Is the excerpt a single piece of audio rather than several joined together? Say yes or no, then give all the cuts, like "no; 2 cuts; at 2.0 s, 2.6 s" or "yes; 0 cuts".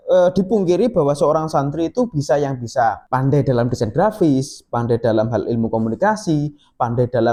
yes; 0 cuts